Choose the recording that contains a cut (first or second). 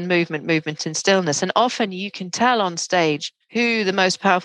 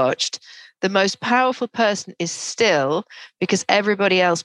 first